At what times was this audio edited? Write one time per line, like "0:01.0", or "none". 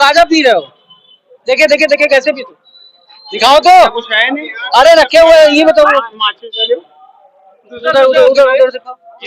none

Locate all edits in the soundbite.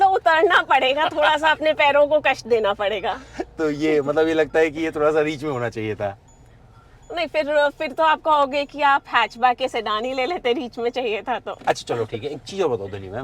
none

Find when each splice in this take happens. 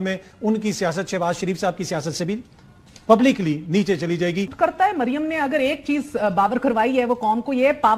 0:04.5

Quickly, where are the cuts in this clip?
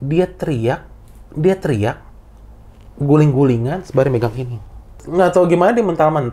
0:05.0

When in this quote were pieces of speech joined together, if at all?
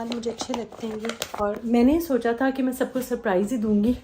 0:01.4

